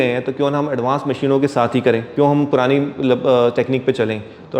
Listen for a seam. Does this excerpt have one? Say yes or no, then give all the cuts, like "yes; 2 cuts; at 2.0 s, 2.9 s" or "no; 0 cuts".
yes; 1 cut; at 2.1 s